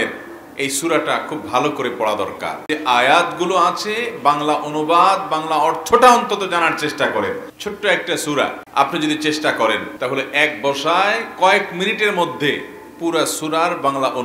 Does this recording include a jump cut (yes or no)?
yes